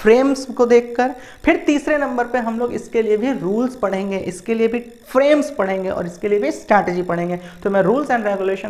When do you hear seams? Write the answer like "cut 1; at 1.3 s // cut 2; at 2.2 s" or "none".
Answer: none